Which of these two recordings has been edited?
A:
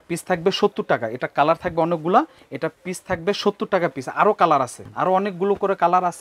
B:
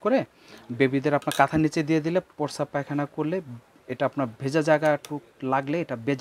A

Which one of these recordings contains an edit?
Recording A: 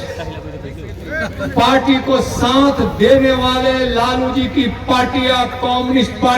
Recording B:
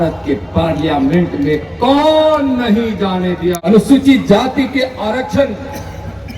B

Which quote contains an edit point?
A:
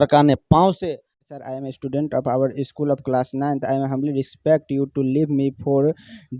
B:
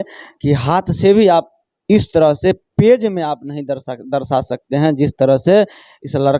A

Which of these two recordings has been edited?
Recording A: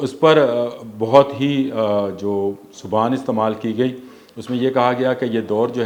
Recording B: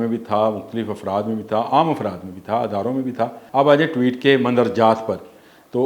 B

